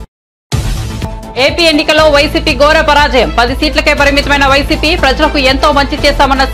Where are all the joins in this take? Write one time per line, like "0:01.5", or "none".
0:01.3